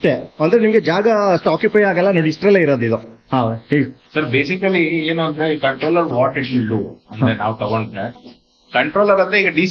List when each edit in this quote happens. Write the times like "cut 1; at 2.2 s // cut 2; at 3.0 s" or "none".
none